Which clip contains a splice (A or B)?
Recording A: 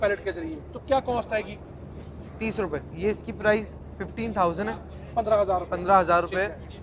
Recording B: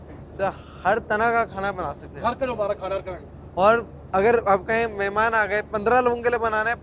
A